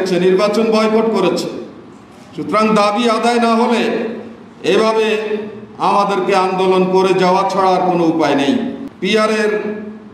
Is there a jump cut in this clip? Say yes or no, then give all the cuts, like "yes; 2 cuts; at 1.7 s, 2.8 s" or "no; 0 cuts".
yes; 1 cut; at 8.9 s